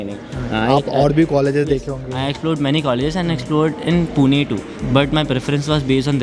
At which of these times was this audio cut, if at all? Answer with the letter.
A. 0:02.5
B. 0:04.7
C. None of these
C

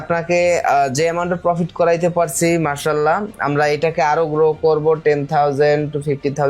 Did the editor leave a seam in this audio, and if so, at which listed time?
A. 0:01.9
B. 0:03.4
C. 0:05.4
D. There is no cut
D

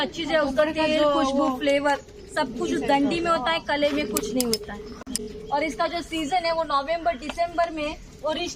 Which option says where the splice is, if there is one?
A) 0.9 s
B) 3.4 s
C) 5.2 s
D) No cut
D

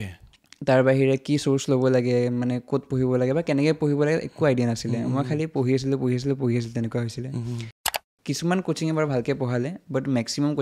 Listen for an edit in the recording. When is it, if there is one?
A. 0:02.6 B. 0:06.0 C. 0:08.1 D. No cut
C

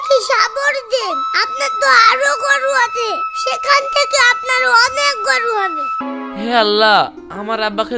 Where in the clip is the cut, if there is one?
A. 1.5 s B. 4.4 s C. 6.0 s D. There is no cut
C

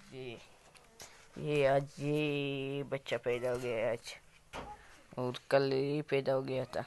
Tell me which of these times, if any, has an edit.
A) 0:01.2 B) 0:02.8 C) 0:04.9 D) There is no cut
D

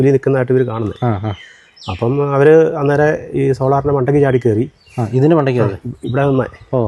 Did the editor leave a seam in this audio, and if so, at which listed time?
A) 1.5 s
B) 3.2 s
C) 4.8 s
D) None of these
D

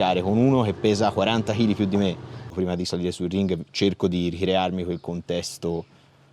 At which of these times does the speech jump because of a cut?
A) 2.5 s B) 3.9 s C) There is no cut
A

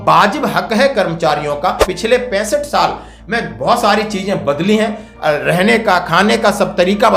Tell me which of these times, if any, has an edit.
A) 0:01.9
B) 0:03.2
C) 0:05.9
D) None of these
A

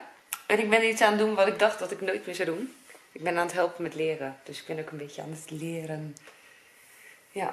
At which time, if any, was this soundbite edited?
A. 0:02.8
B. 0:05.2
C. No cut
C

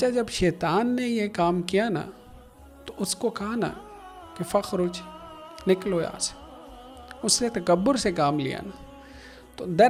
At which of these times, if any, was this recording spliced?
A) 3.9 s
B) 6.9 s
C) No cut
C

